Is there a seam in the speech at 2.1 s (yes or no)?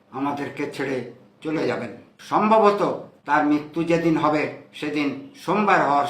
yes